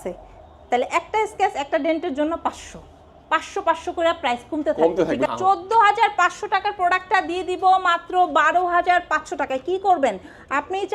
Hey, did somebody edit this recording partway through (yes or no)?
yes